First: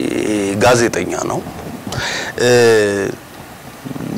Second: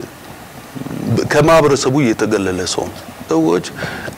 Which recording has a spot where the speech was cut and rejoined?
second; 1 cut; at 3.3 s

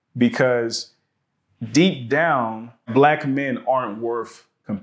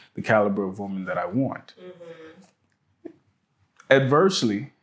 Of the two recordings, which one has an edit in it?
first; 1 cut; at 2.8 s

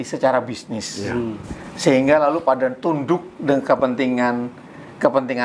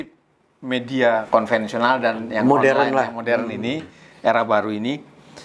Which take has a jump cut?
second; 1 cut; at 1.3 s

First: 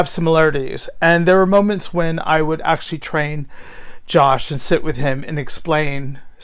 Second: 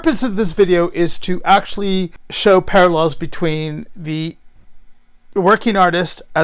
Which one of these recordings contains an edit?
second; 1 cut; at 2.2 s

